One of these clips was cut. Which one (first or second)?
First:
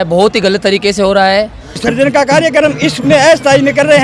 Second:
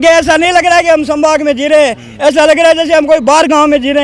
first